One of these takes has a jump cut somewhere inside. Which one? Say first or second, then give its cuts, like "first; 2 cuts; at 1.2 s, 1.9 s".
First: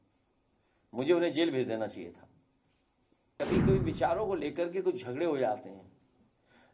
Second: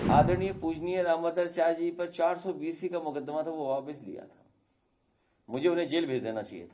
first; 1 cut; at 3.3 s